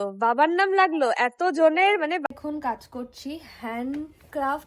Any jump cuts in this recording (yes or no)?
yes